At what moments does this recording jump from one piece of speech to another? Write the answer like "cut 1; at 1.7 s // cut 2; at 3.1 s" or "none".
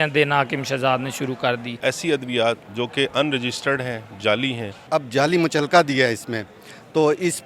cut 1; at 1.8 s // cut 2; at 4.8 s